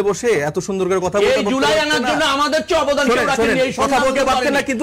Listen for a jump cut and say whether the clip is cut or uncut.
uncut